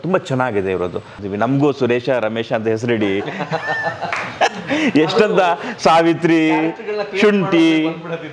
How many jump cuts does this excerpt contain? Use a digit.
1